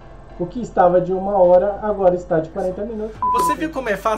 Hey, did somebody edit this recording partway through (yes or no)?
yes